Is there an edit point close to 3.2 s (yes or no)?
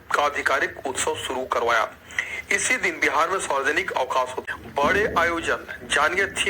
no